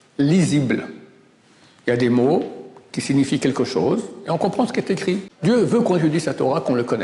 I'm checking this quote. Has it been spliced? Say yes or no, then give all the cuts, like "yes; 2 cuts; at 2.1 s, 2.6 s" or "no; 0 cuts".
yes; 1 cut; at 5.3 s